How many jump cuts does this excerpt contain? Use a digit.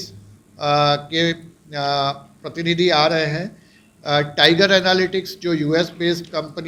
0